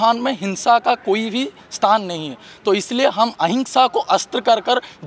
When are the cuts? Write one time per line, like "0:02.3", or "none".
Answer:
none